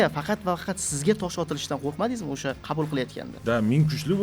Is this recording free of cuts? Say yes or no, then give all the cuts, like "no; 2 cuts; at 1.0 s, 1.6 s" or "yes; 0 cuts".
no; 1 cut; at 3.3 s